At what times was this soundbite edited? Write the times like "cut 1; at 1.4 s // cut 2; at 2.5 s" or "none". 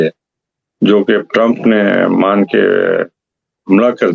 none